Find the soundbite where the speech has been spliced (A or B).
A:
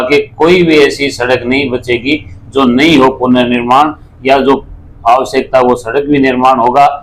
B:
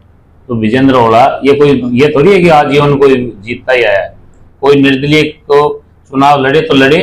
B